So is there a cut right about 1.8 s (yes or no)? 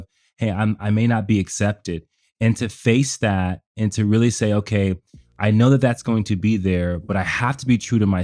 no